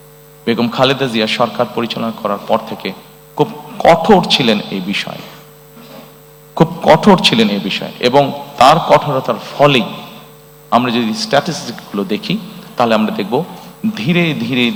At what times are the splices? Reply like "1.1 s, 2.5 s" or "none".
none